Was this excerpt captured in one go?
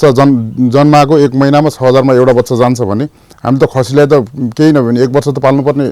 yes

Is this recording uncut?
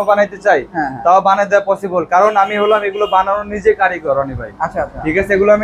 yes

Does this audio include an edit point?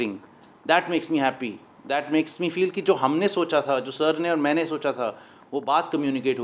no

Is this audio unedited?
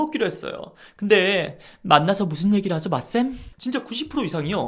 yes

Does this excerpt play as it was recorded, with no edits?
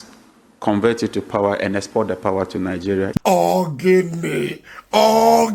no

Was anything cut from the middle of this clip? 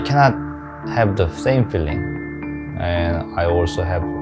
no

